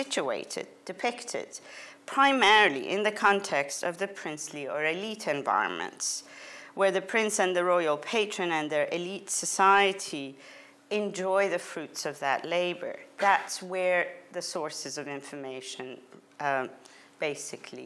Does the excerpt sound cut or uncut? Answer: uncut